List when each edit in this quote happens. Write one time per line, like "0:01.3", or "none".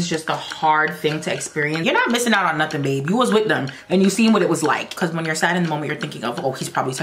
0:01.8
0:04.9